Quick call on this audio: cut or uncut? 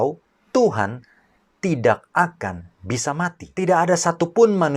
cut